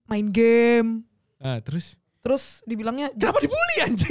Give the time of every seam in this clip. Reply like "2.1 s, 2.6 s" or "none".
none